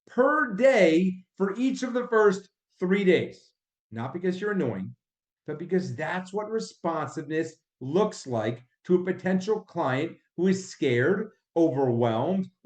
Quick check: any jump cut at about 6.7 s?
no; 1 cut; at 3.5 s

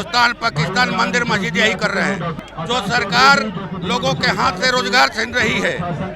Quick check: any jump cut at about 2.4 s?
yes; 1 cut; at 2.4 s

